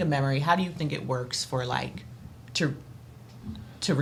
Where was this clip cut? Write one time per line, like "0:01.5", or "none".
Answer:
none